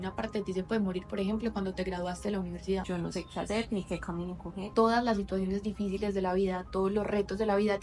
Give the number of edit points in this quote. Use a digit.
2